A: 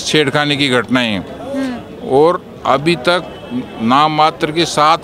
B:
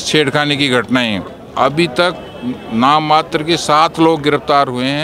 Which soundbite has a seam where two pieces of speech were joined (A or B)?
B